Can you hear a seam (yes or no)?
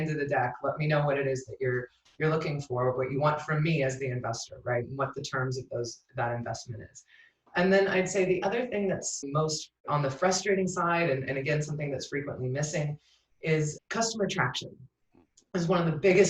yes